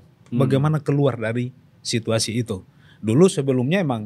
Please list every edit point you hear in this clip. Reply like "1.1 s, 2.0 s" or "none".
none